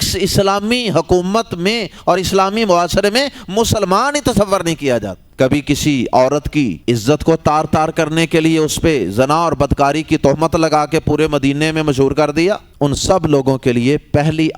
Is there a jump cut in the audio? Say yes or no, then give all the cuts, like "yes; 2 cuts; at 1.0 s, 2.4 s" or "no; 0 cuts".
yes; 3 cuts; at 5.2 s, 6.8 s, 12.7 s